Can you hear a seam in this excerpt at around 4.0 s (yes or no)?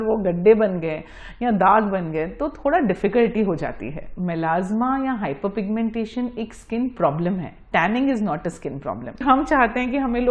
yes